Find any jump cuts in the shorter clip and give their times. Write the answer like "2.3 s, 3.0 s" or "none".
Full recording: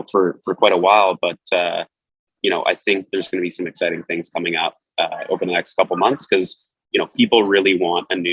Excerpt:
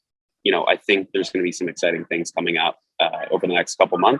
none